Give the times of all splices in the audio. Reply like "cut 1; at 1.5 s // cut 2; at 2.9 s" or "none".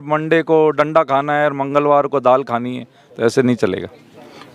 none